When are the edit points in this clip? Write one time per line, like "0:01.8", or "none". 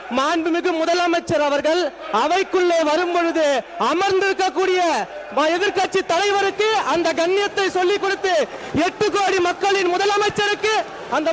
none